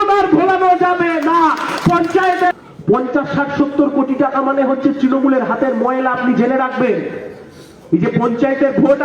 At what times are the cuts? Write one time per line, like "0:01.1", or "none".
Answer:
0:02.5